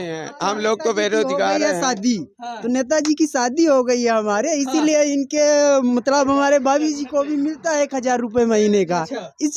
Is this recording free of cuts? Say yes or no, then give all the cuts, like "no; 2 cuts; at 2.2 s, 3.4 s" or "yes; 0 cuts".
yes; 0 cuts